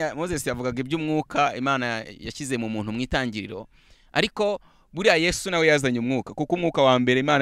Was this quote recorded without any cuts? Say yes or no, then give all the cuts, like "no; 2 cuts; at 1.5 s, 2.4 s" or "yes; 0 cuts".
yes; 0 cuts